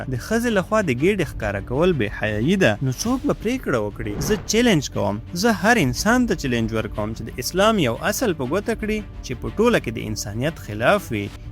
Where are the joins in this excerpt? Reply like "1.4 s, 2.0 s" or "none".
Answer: 4.1 s